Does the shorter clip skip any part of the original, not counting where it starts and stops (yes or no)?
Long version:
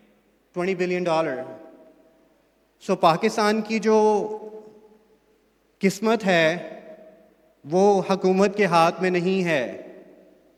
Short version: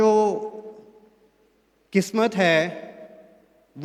no